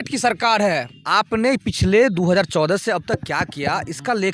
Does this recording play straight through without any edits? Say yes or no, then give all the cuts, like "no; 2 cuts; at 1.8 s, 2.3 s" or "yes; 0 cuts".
no; 1 cut; at 0.9 s